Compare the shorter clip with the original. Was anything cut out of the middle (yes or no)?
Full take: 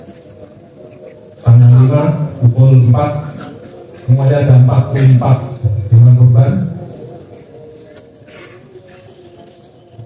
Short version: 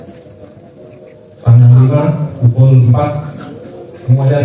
no